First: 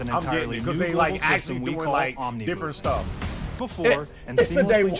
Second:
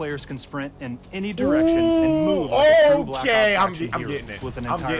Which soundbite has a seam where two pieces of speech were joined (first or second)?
first